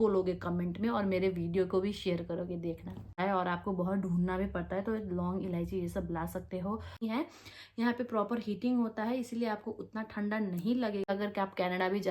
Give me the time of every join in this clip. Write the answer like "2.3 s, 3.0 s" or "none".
3.1 s, 7.0 s, 11.1 s